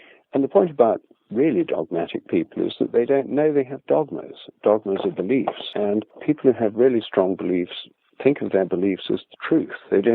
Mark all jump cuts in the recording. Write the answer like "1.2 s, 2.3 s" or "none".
5.8 s